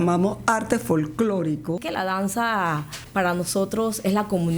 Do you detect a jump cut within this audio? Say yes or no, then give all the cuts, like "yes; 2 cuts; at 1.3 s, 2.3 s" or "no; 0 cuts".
yes; 2 cuts; at 1.8 s, 2.9 s